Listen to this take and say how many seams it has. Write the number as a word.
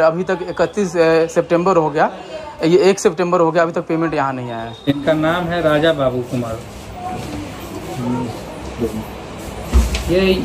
one